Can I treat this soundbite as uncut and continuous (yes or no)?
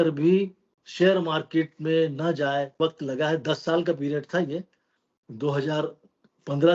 no